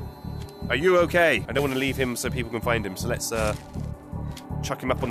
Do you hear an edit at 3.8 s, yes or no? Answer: no